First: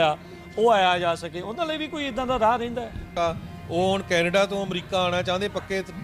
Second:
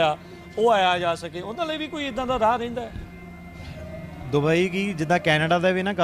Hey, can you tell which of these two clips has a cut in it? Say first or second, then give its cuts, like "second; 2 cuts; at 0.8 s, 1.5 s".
first; 1 cut; at 3.1 s